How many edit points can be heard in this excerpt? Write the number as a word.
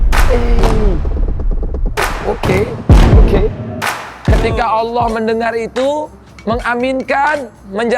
one